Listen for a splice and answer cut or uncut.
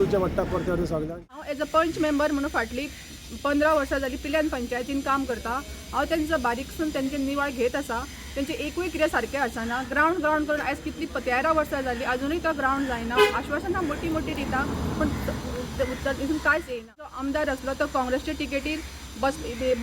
cut